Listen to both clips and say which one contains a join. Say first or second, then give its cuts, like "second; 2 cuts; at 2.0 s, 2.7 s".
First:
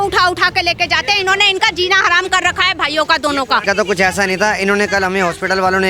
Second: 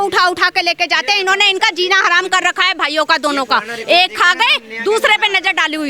first; 1 cut; at 3.6 s